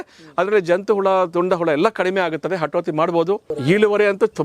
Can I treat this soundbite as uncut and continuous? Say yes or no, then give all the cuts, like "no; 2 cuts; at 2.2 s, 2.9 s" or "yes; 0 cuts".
no; 1 cut; at 3.5 s